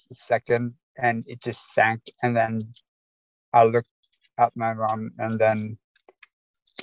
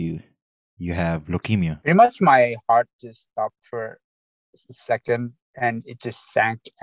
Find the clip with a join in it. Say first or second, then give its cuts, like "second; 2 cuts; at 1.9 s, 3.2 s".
second; 1 cut; at 1.8 s